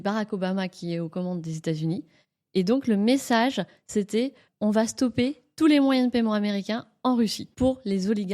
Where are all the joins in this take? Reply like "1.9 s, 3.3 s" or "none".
4.5 s, 7.4 s